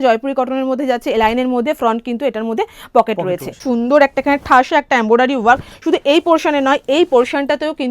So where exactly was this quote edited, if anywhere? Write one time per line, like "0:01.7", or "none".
0:03.6